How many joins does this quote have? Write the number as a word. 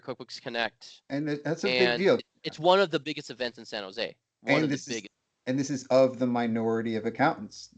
one